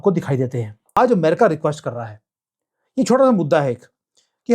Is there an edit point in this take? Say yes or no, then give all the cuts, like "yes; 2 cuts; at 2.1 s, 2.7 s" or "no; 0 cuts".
yes; 1 cut; at 1.0 s